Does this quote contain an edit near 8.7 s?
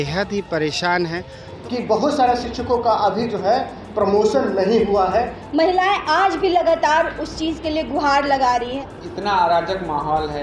yes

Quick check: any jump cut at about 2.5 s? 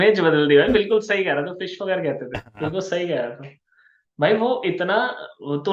no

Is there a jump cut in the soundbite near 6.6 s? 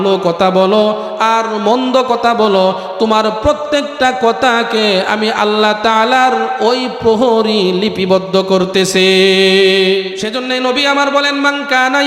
no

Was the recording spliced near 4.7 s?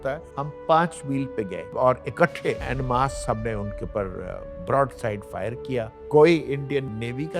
no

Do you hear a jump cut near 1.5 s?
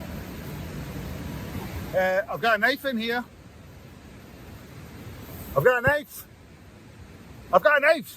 yes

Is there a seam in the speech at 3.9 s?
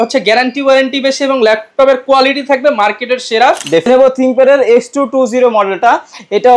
yes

